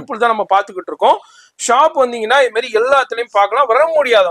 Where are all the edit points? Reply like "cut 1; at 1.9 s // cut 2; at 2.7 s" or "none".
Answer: none